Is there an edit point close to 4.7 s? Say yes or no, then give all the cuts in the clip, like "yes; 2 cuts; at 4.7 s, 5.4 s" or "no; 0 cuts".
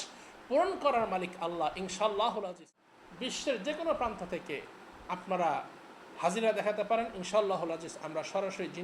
no; 1 cut; at 2.7 s